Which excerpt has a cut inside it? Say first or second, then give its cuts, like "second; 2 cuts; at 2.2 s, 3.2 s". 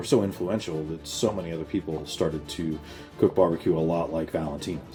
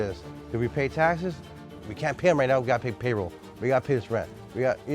second; 1 cut; at 1.6 s